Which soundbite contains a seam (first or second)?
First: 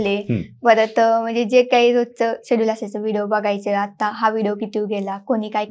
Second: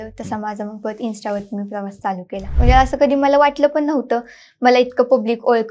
second